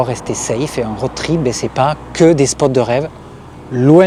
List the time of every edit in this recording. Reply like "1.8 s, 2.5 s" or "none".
none

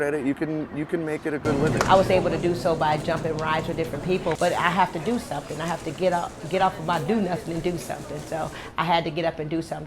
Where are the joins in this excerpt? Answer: 1.7 s, 4.4 s

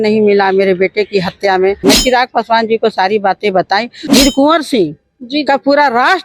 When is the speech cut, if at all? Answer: 1.8 s, 4.0 s

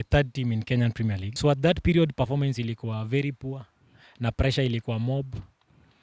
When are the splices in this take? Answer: 1.2 s

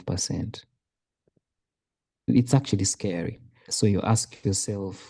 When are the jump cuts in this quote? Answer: 3.7 s

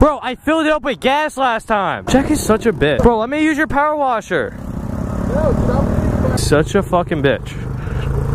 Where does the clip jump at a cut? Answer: 2.0 s, 3.0 s, 6.4 s

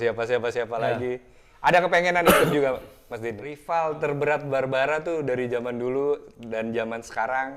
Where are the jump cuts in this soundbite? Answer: 3.5 s

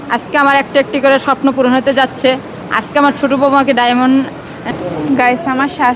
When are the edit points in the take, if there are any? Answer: 4.6 s

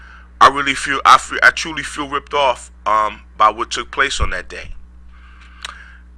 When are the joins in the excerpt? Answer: 3.3 s

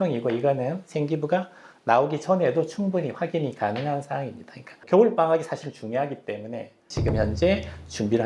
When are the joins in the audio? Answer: 6.8 s

